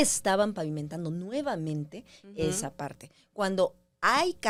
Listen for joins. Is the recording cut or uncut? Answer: uncut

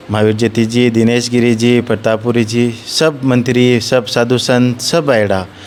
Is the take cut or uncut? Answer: uncut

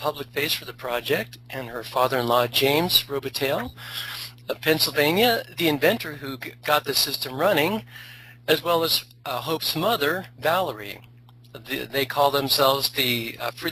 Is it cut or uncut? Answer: uncut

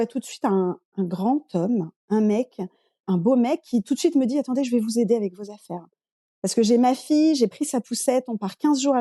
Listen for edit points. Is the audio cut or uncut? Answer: uncut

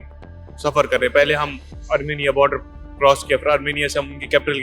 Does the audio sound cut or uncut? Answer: cut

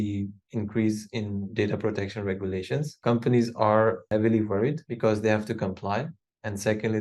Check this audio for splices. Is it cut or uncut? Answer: cut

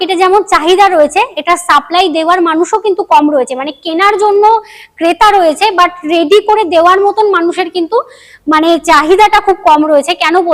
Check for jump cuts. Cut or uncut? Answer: uncut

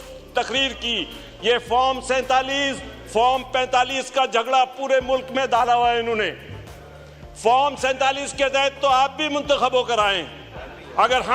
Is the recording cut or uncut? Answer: uncut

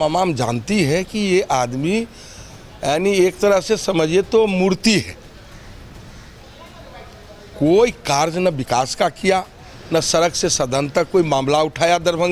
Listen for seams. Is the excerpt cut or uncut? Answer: uncut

